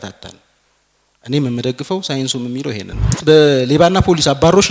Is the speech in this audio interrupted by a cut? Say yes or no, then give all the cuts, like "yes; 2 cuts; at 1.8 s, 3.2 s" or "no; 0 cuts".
yes; 1 cut; at 3.2 s